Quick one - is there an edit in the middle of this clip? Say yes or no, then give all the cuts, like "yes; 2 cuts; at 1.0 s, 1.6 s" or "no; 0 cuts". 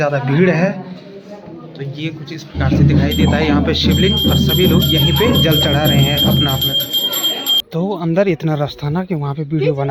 no; 0 cuts